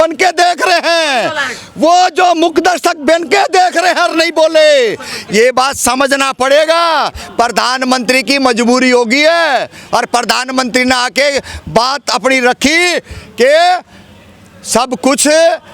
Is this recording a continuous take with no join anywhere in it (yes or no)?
yes